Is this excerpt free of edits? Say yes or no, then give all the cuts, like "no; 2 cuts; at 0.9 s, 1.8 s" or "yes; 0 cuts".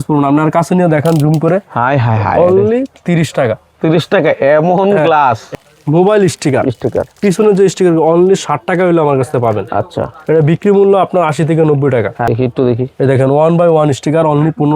no; 2 cuts; at 5.5 s, 12.2 s